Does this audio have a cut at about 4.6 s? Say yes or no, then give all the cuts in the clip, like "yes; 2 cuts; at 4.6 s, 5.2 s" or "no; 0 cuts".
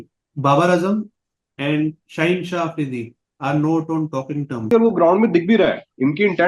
yes; 1 cut; at 4.6 s